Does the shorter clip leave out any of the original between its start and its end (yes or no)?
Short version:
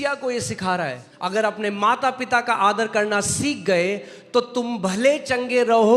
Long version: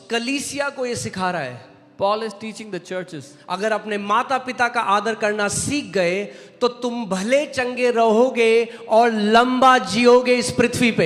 yes